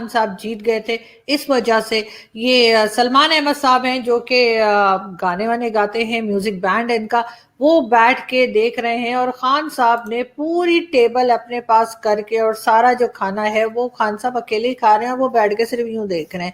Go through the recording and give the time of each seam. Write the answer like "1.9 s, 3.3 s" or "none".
none